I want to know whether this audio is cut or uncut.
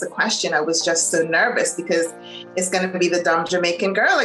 uncut